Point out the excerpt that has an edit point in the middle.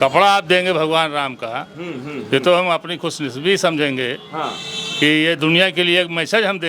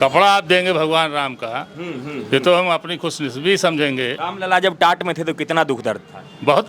second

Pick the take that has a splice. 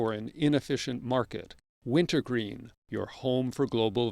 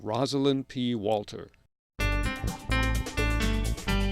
second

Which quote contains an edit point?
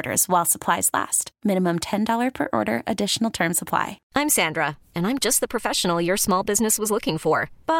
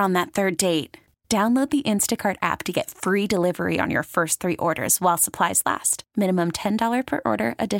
first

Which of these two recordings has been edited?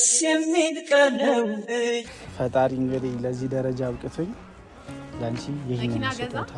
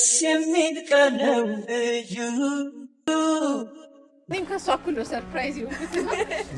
first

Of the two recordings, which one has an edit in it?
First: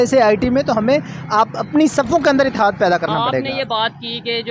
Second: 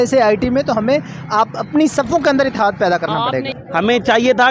second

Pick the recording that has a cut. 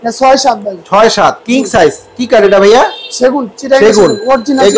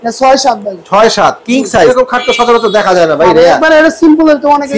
second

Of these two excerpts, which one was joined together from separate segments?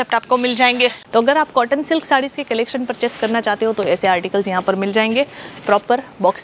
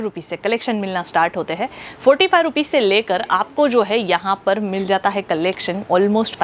first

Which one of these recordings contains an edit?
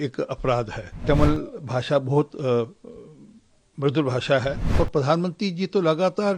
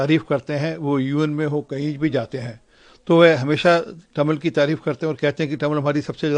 first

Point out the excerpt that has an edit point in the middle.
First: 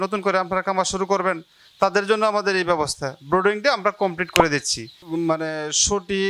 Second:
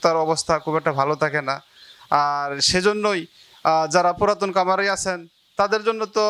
first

